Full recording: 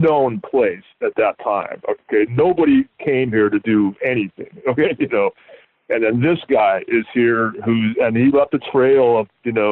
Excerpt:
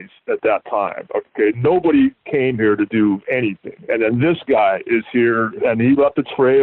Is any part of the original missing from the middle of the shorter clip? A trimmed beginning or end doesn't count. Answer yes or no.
yes